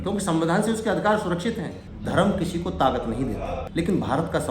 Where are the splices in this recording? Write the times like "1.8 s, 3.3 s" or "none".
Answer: 1.8 s, 3.6 s

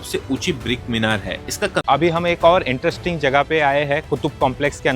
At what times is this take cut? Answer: 1.8 s

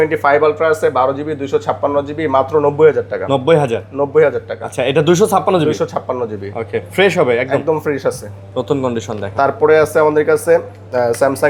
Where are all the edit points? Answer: none

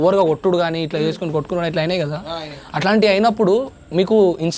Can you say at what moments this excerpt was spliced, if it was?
none

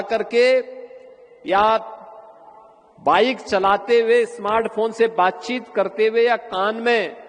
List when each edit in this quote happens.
none

